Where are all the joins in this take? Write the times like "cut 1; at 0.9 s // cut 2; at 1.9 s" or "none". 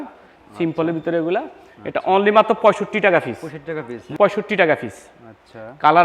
cut 1; at 4.0 s